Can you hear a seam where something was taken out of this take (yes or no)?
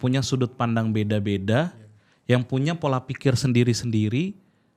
no